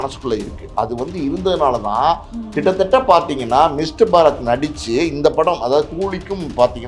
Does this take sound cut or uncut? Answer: uncut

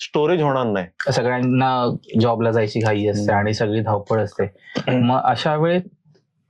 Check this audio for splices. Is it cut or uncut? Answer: cut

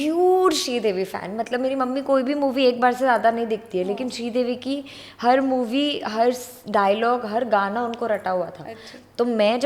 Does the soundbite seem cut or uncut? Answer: uncut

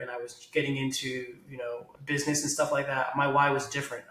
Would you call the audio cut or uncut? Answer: cut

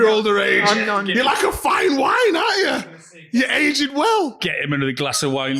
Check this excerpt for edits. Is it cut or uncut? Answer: uncut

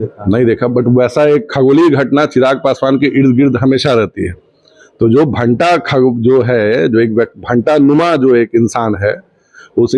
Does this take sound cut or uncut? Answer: uncut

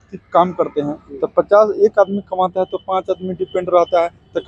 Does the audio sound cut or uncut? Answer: uncut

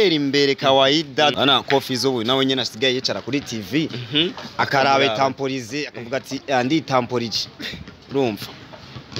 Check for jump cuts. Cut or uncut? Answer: cut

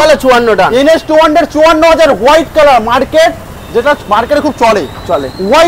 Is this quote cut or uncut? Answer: uncut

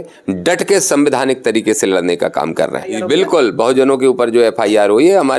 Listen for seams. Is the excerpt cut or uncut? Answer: cut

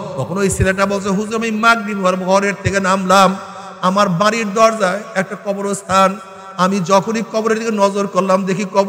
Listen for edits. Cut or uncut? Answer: uncut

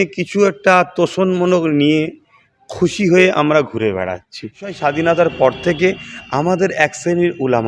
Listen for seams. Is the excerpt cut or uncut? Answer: cut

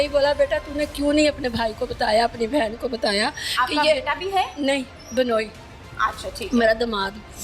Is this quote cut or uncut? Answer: uncut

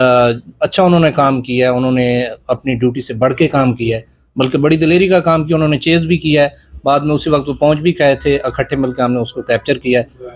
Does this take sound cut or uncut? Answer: uncut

